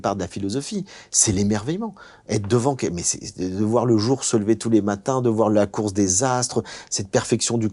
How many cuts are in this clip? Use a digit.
0